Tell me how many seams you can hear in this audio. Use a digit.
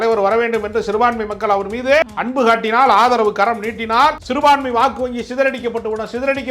2